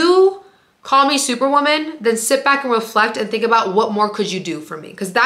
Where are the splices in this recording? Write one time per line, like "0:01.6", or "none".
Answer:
none